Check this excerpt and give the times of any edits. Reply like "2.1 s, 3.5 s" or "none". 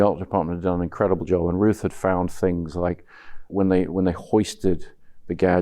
3.5 s